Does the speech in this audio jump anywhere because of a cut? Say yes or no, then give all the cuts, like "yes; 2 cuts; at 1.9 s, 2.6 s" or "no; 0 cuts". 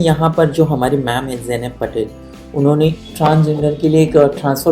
yes; 1 cut; at 3.1 s